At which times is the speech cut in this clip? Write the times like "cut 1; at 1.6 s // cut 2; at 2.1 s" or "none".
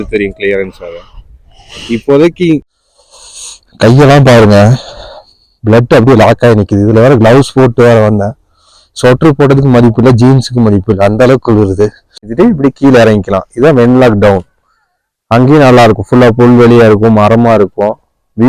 cut 1; at 2.7 s // cut 2; at 12.3 s